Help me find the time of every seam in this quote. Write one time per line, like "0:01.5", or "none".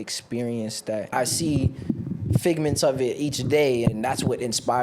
0:01.1
0:03.8